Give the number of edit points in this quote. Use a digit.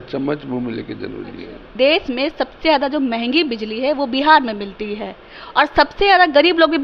1